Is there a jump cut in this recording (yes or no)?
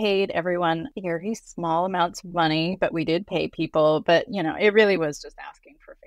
no